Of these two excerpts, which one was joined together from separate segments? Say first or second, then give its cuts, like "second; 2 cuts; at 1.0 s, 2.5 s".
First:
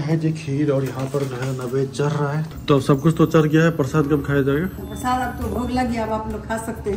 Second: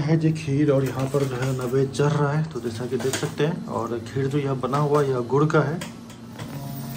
first; 1 cut; at 2.5 s